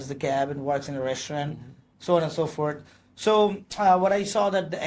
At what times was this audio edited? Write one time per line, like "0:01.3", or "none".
none